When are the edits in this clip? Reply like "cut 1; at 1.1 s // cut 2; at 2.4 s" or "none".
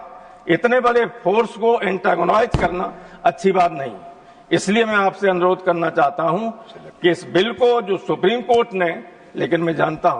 none